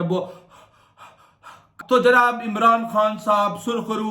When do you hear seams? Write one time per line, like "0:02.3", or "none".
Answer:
0:01.7